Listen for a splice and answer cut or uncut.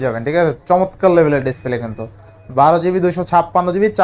uncut